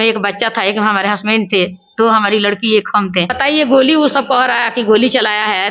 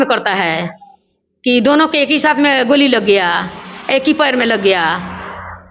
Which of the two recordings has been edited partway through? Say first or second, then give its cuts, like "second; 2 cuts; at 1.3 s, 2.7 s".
first; 1 cut; at 3.4 s